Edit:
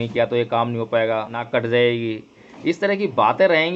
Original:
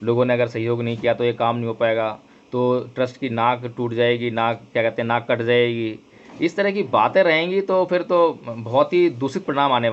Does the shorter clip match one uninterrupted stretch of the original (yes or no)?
no